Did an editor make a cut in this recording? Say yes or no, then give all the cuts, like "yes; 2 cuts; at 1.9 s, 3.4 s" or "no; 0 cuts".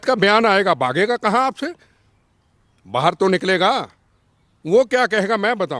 no; 0 cuts